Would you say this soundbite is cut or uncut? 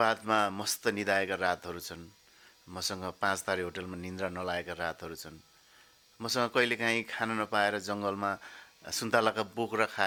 uncut